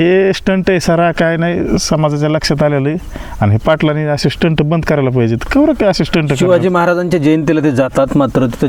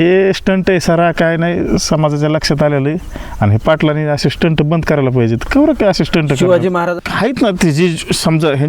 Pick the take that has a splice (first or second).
second